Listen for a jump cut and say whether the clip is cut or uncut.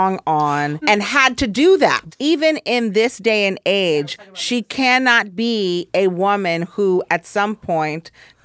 cut